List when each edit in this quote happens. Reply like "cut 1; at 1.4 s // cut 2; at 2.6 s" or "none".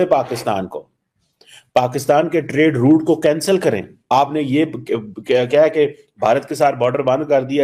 cut 1; at 4.1 s